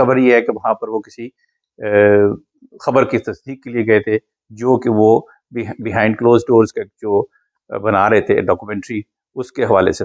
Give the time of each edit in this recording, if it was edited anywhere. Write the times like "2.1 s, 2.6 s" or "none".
none